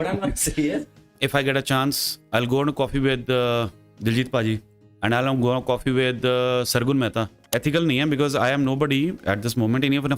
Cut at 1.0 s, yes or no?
yes